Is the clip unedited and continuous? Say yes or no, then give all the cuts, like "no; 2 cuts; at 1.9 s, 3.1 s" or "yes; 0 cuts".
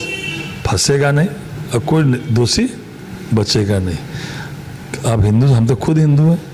yes; 0 cuts